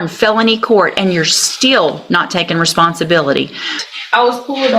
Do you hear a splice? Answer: yes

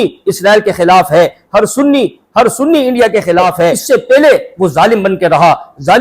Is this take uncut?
no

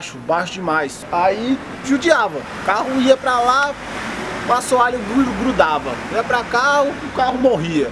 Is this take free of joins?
no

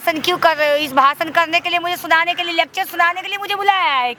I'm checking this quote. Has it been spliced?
no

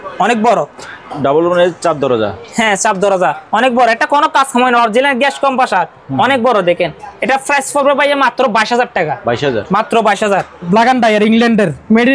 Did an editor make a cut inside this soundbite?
yes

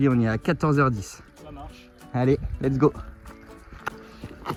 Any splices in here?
no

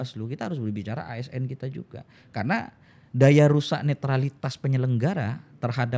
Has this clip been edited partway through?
no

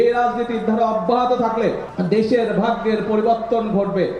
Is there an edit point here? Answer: yes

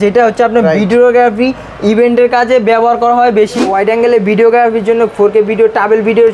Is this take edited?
yes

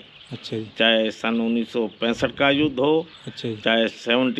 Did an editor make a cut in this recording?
no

